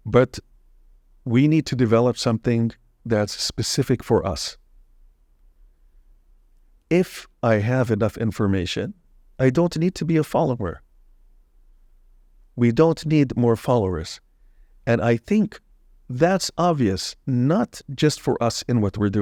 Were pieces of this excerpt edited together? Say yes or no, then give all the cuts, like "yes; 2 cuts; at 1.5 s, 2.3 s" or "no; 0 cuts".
no; 0 cuts